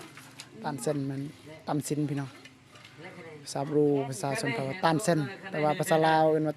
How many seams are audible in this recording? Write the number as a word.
zero